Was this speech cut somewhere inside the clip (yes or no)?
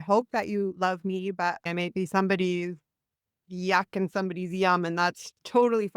yes